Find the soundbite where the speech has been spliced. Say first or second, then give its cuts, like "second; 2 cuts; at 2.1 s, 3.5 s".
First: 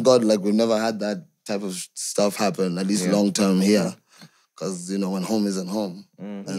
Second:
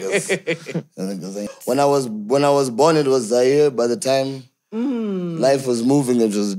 second; 1 cut; at 1.6 s